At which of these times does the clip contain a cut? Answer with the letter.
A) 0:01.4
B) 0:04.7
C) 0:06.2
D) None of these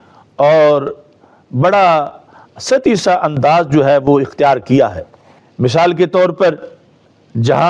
D